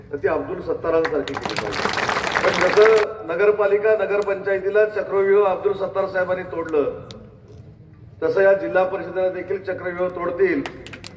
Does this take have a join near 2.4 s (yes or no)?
yes